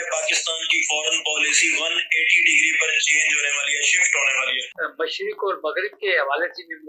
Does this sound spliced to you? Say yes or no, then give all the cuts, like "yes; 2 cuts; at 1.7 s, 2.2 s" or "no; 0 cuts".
yes; 1 cut; at 4.6 s